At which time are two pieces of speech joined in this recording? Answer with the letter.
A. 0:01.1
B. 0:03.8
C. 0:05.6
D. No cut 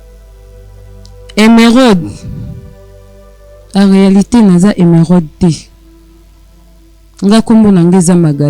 A